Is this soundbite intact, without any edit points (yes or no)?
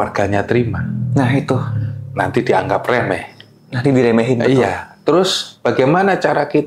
yes